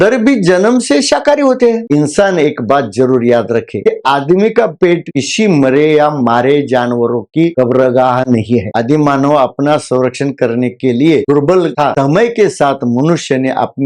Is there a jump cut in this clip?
yes; 3 cuts; at 1.8 s, 8.7 s, 11.9 s

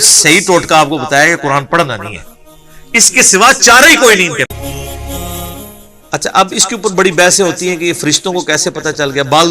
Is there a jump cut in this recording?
yes; 1 cut; at 4.5 s

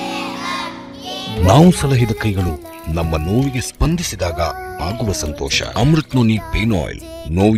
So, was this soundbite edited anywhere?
no; 0 cuts

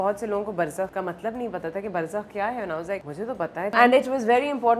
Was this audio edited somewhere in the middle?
yes; 2 cuts; at 0.9 s, 3.7 s

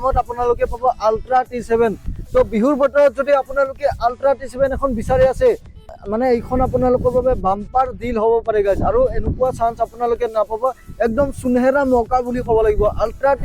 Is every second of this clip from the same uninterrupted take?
no; 1 cut; at 5.9 s

